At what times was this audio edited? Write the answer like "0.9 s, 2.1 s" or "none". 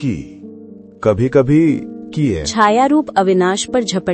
2.4 s